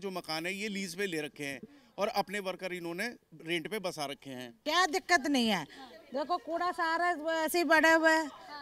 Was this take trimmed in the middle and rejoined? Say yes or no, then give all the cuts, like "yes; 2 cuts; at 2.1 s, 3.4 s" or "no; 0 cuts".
yes; 1 cut; at 4.5 s